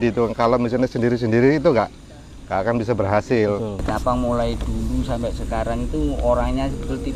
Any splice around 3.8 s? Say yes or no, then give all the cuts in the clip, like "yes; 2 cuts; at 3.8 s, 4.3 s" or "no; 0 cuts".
yes; 1 cut; at 3.8 s